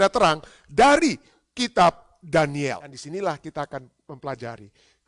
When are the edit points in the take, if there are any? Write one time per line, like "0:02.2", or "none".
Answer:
0:03.0